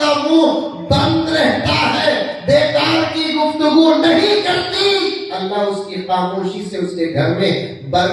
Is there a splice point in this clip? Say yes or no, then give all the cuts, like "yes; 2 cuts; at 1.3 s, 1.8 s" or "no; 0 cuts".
no; 0 cuts